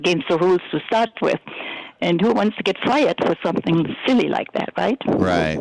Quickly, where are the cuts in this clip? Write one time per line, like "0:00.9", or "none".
none